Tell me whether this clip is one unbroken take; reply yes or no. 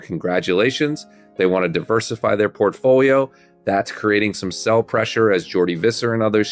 yes